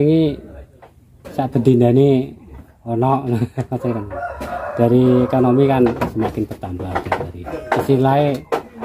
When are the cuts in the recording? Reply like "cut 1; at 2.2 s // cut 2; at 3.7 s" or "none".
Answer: cut 1; at 7.4 s